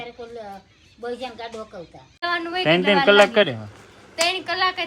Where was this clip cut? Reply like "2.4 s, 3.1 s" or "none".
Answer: 2.2 s